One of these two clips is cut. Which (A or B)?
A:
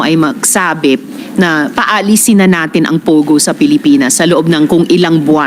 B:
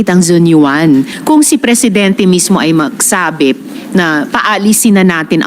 B